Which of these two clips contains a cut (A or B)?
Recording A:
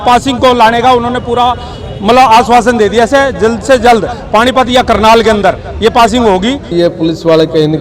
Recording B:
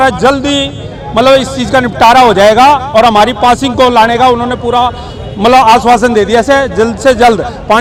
A